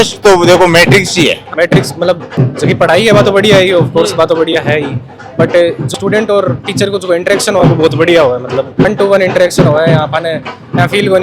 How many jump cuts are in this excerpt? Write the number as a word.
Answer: two